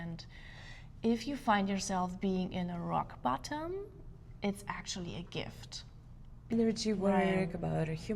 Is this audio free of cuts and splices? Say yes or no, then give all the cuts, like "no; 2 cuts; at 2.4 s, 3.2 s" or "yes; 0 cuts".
no; 1 cut; at 6.5 s